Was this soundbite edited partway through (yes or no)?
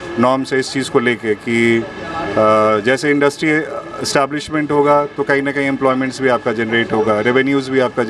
no